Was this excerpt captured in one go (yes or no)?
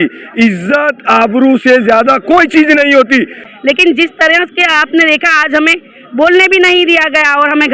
no